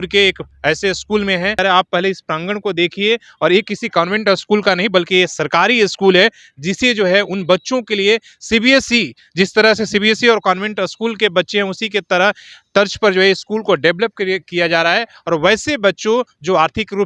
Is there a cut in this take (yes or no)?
no